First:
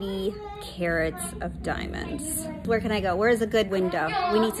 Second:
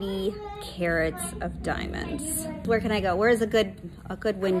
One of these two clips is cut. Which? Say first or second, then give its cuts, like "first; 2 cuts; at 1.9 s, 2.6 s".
first; 1 cut; at 3.7 s